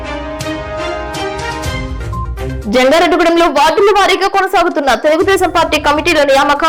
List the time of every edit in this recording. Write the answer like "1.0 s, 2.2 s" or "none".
none